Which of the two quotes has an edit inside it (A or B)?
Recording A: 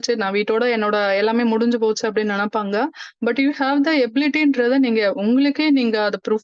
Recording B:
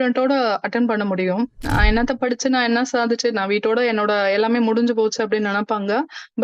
B